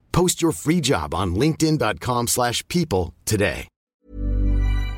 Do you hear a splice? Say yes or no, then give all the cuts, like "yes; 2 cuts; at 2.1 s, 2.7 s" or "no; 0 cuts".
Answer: yes; 1 cut; at 4.0 s